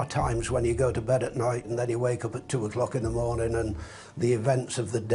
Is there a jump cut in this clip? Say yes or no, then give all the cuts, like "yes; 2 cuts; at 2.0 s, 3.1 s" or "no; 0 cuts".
yes; 1 cut; at 1.7 s